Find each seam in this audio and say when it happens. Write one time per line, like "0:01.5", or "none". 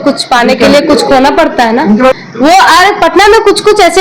0:02.2